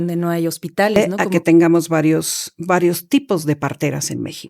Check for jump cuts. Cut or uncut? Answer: cut